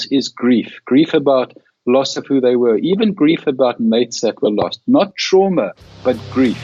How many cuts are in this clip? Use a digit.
1